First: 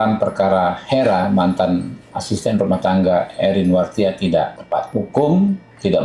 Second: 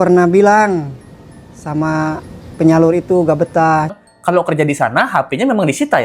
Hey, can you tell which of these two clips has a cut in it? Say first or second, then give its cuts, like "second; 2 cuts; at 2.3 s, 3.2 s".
second; 1 cut; at 4.0 s